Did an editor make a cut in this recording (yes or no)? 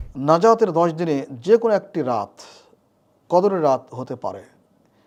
no